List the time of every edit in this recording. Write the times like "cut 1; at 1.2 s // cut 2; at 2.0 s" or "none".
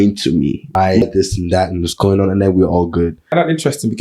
cut 1; at 1.0 s // cut 2; at 3.3 s